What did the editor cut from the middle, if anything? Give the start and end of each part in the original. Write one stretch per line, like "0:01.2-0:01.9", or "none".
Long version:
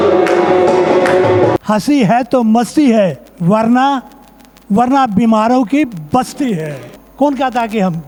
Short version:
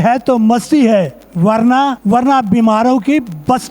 0:04.0-0:04.6